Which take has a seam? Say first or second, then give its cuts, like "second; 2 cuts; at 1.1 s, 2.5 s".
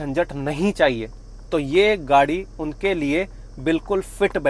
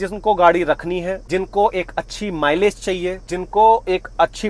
second; 2 cuts; at 1.2 s, 3.2 s